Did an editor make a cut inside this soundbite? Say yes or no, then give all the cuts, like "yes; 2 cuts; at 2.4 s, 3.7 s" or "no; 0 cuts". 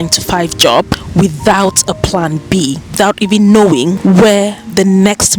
yes; 3 cuts; at 1.0 s, 2.9 s, 4.0 s